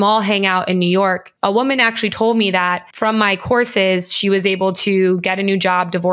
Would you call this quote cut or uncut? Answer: cut